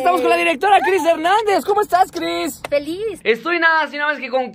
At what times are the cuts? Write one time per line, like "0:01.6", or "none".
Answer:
0:03.2